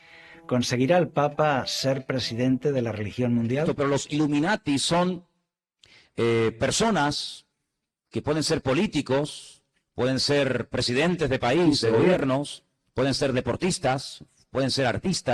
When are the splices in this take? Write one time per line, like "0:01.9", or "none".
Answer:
0:03.7